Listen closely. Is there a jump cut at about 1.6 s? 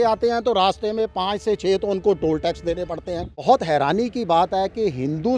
no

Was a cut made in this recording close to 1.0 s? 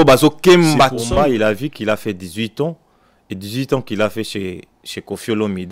yes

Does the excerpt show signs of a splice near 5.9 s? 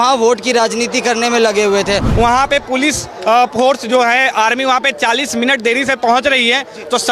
no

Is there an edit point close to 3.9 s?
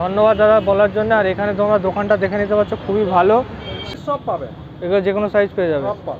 yes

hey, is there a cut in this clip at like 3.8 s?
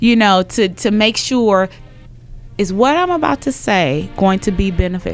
no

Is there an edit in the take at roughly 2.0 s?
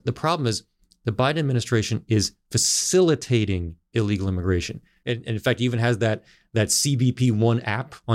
no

